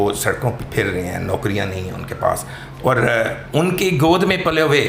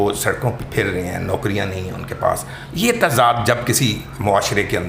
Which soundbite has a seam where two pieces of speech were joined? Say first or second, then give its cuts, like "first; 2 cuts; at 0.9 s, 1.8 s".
second; 1 cut; at 2.6 s